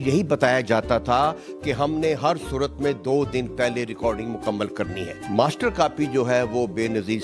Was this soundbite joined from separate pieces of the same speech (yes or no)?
no